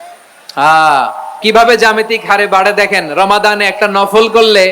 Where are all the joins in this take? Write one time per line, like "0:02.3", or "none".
0:01.4